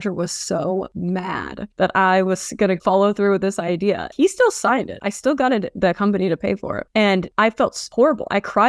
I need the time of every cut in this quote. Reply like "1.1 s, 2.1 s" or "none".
4.1 s